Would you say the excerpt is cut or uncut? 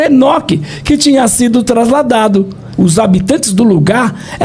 cut